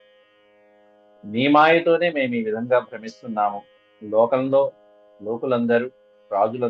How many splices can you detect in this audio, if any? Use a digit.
1